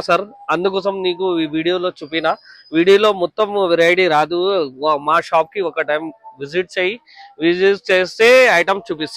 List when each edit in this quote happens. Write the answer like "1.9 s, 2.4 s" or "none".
none